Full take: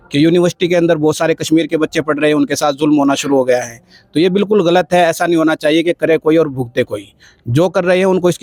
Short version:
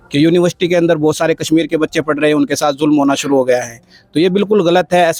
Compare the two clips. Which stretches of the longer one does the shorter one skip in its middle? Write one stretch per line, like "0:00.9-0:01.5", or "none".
none